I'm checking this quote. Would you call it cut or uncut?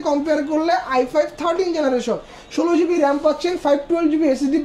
uncut